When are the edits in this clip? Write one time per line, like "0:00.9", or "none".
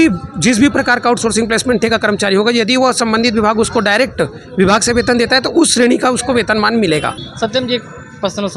0:07.2